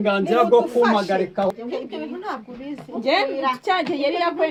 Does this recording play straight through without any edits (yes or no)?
yes